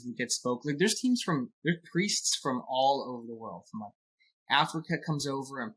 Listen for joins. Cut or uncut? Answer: uncut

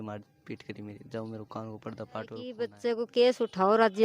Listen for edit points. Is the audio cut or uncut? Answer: cut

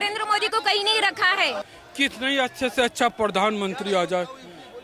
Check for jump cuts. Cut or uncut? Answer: cut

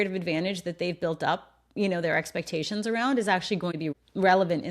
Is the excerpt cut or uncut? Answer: cut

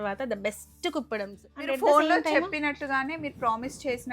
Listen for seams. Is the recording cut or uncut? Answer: cut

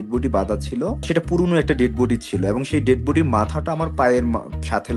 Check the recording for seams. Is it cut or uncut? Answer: cut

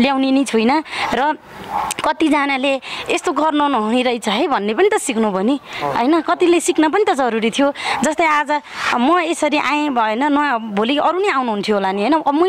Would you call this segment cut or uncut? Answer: uncut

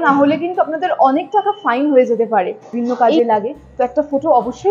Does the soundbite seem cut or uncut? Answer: cut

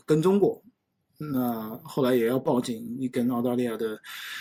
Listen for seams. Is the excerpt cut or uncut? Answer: uncut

